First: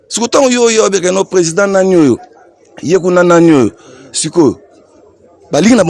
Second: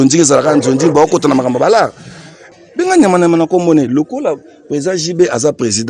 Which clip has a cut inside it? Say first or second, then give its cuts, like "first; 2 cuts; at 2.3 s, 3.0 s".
second; 1 cut; at 2.4 s